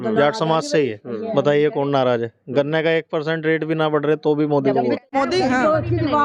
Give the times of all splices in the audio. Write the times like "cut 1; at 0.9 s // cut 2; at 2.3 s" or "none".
cut 1; at 5.0 s